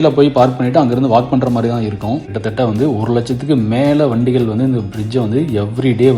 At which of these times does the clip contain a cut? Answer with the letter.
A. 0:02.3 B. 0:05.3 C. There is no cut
A